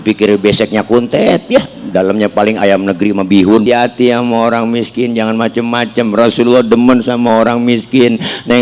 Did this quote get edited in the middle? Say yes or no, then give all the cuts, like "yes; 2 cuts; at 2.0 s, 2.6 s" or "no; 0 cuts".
yes; 1 cut; at 3.6 s